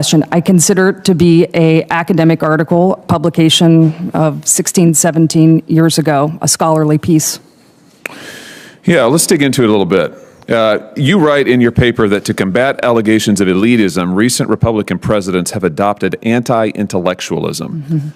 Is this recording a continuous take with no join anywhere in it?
yes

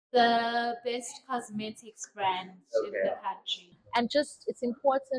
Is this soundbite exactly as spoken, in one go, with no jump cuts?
no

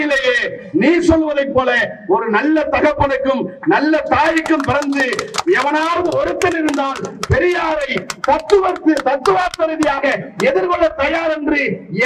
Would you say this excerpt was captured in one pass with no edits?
yes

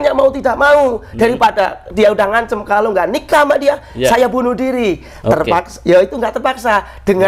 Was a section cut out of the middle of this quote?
no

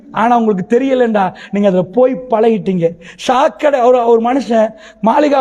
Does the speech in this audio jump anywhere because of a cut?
no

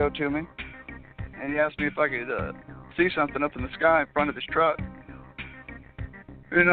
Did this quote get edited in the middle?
no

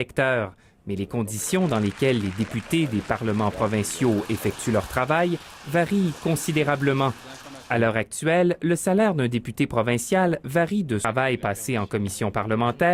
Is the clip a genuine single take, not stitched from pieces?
yes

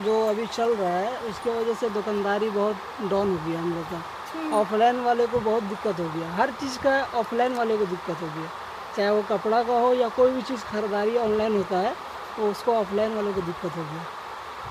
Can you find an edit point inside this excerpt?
no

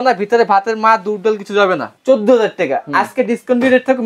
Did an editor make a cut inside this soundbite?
yes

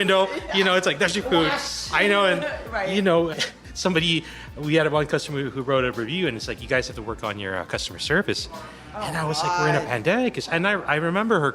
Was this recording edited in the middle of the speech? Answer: yes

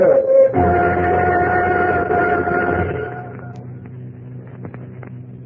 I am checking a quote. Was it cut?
yes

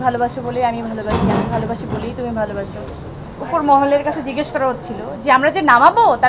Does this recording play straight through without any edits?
no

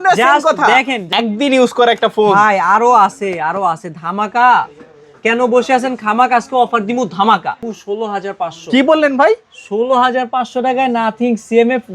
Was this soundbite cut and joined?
yes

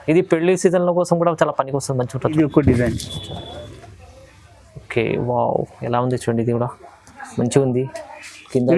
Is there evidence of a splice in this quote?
yes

